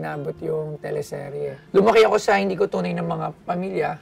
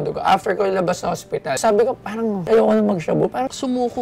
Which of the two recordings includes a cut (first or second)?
first